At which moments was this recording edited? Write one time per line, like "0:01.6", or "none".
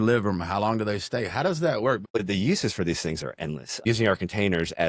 0:02.1
0:03.8